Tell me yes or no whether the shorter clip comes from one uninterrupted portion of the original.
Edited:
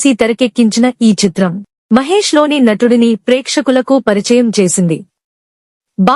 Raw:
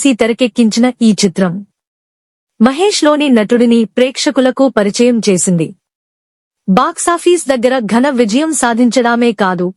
no